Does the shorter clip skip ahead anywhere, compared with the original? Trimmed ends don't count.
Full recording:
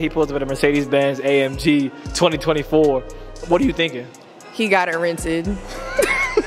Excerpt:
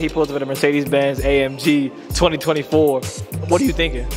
no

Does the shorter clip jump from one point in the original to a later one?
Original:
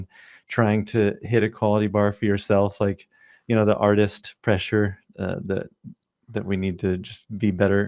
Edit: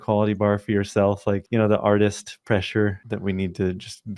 yes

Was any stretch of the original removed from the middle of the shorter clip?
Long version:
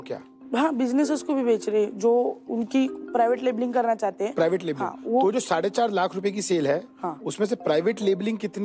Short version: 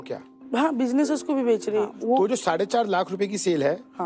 yes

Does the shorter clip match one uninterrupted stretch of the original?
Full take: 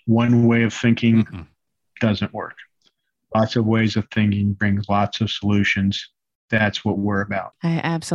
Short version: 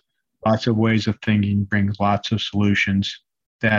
yes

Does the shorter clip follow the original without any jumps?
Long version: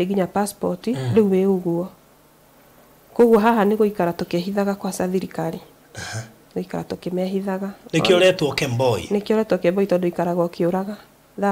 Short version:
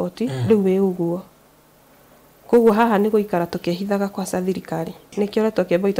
no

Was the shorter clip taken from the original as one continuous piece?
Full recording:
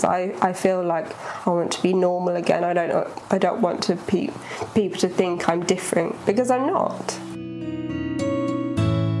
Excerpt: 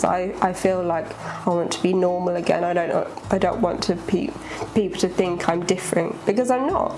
yes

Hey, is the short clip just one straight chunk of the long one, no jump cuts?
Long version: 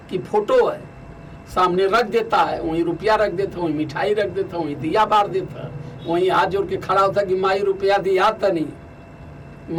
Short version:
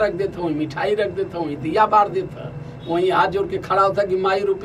yes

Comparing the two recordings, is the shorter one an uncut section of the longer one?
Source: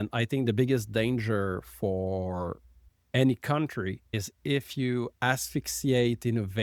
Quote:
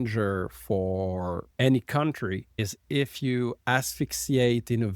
no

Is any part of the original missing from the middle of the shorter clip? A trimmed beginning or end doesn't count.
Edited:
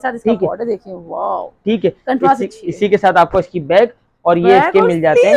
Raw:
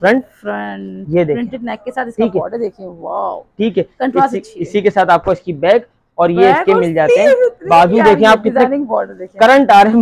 no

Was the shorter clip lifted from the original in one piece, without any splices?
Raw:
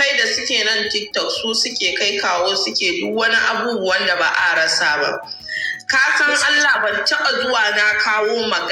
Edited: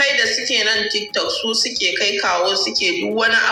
yes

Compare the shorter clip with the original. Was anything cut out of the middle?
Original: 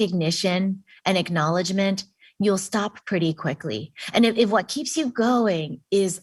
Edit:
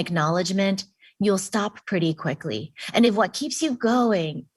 yes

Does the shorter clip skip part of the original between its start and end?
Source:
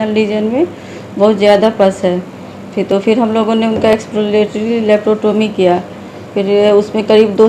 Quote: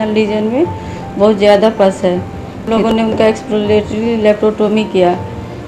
yes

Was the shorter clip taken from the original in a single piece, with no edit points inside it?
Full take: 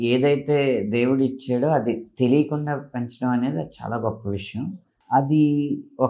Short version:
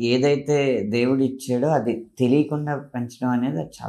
yes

